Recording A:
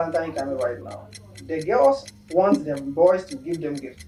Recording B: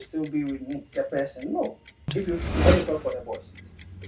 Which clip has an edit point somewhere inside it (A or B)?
B